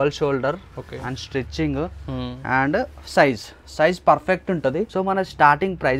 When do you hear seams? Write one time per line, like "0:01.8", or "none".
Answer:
0:04.9